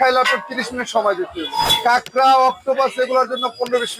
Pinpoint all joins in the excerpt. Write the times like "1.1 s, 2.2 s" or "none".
1.5 s

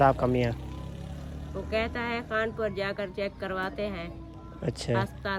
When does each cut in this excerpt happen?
none

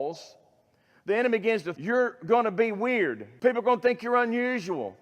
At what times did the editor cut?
1.7 s, 3.2 s

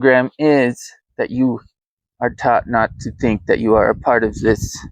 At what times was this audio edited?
none

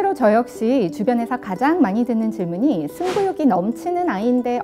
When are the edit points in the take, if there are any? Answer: none

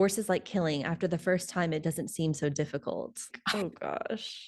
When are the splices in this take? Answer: 3.3 s

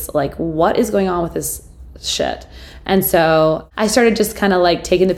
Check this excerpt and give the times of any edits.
3.7 s

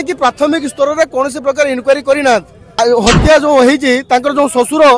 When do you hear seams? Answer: 2.8 s

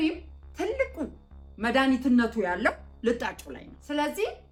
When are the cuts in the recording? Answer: none

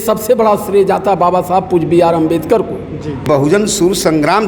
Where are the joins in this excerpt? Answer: 3.2 s

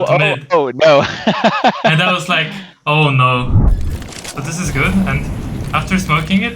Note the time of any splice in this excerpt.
3.6 s

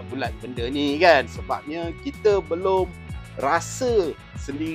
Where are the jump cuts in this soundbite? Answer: 1.3 s

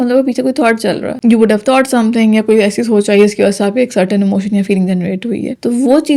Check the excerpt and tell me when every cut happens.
1.1 s

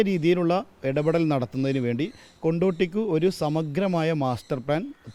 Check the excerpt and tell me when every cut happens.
none

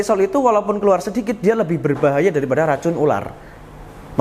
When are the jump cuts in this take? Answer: none

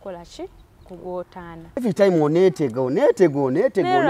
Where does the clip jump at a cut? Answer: 1.8 s

